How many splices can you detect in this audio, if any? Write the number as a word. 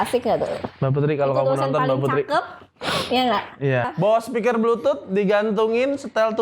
one